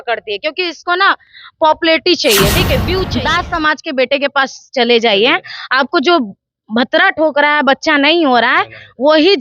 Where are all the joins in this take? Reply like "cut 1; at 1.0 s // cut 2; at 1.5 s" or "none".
cut 1; at 3.0 s